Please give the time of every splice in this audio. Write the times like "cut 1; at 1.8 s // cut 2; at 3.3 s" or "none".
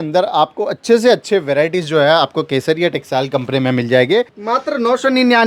cut 1; at 4.4 s